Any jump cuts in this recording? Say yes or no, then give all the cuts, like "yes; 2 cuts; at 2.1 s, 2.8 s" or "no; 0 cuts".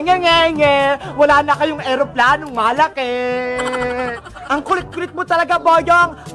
no; 0 cuts